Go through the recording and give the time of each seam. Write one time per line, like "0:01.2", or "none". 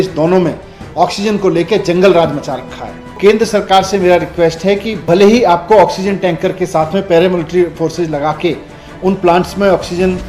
0:03.1